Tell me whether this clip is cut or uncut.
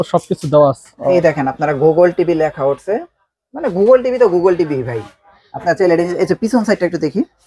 cut